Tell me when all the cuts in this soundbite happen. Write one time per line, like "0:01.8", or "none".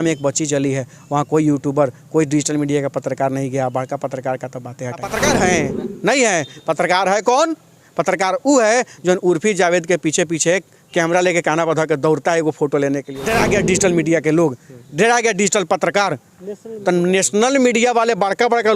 0:05.1
0:13.1

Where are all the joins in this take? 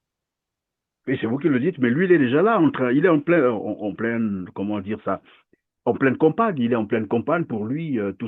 none

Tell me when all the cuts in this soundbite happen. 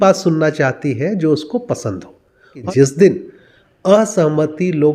0:02.6

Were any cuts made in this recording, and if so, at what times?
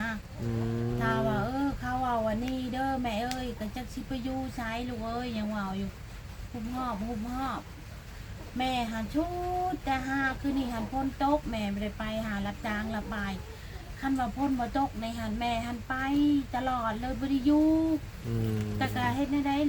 none

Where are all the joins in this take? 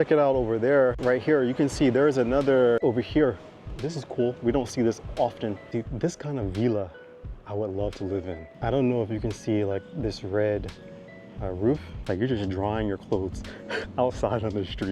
0:01.0
0:02.8
0:05.7
0:08.5
0:11.9

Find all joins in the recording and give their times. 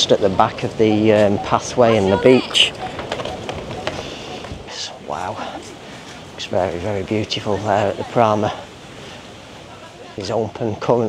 0:04.7
0:10.2

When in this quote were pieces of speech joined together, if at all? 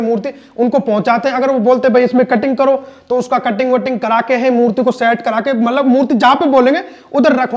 none

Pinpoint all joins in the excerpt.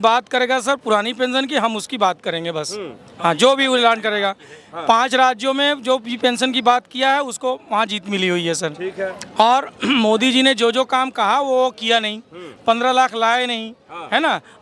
none

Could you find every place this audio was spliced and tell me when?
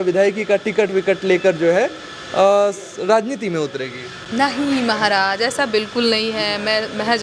none

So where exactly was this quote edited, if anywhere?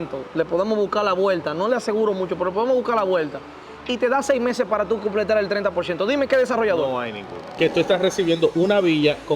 0:07.5

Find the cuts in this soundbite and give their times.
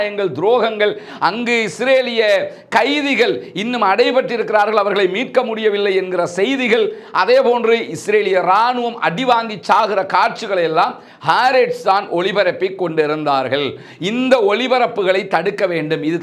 none

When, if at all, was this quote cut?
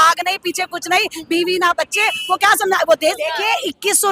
0:03.2

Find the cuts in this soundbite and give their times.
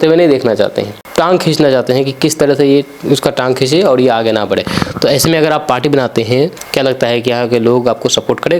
0:01.0
0:06.6

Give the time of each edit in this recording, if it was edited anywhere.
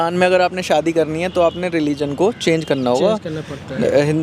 none

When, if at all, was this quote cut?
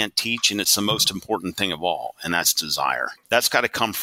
0:03.1

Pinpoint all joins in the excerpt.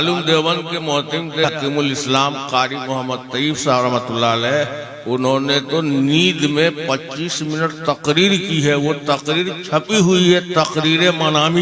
0:01.5

